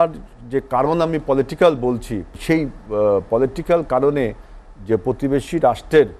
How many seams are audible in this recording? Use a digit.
1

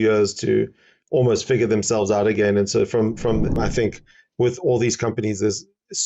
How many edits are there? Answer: 1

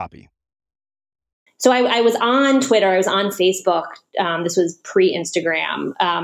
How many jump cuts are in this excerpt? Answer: 1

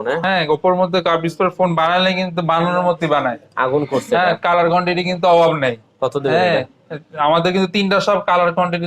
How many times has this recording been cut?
0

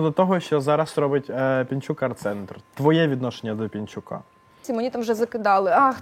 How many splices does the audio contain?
1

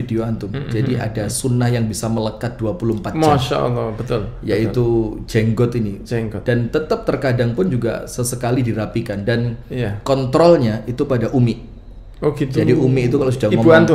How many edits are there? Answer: 0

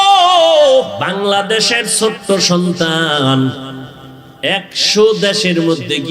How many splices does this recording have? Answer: 1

